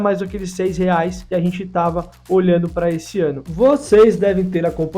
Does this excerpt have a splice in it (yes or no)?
yes